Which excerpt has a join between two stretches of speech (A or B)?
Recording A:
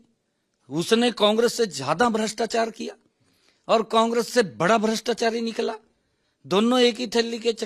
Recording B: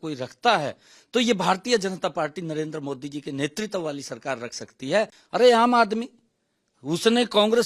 B